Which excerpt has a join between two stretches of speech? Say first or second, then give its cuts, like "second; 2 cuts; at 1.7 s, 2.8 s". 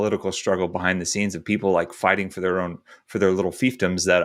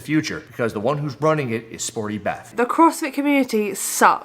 second; 1 cut; at 2.5 s